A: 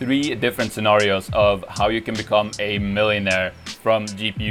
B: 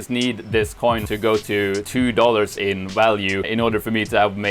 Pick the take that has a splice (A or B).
B